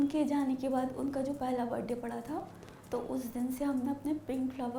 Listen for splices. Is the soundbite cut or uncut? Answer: uncut